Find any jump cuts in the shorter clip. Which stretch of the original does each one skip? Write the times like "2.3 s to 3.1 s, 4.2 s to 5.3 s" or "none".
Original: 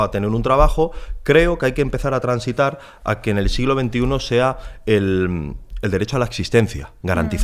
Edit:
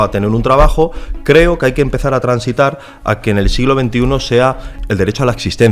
4.7 s to 5.6 s